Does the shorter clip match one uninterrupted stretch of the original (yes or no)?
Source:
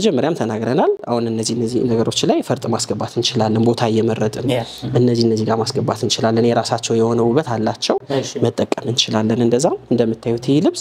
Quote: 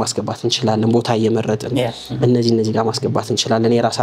yes